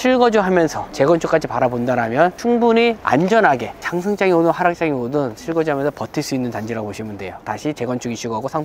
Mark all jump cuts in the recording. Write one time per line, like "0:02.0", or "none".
none